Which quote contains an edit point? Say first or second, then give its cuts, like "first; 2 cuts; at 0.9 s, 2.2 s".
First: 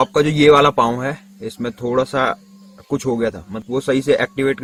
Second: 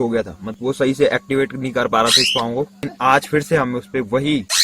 second; 1 cut; at 2.9 s